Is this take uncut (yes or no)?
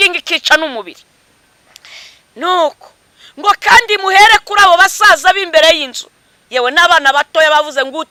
yes